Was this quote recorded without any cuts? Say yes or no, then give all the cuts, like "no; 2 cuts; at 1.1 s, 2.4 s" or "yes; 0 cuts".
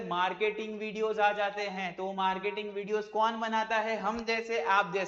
yes; 0 cuts